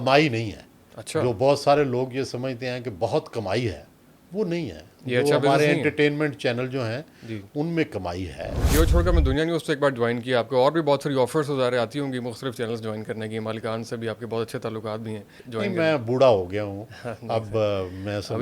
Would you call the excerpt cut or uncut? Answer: cut